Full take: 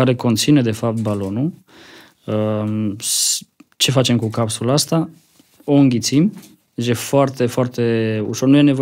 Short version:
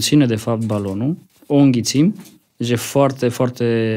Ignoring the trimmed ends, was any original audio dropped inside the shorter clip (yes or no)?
yes